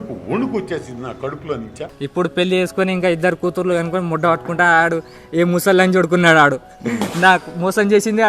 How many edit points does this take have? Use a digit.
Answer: 1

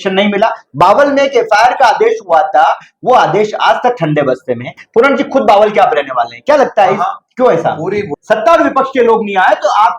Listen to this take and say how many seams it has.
1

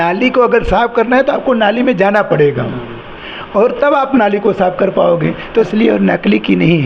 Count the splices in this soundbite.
1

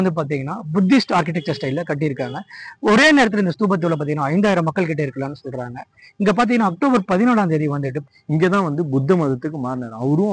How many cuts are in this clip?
1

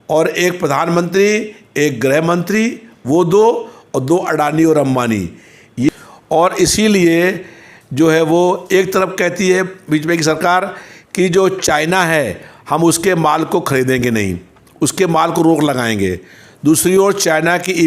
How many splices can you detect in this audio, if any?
1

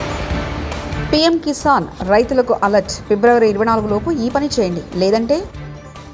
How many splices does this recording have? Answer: 1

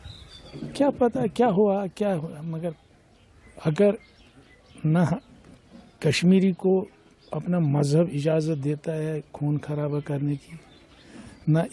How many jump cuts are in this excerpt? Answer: 0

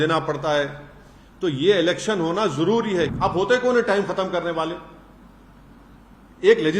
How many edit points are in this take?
1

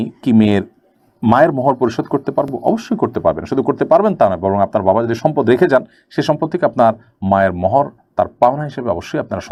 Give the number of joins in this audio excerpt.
0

